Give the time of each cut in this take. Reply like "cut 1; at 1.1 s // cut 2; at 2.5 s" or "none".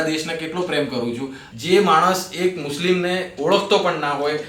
cut 1; at 1.4 s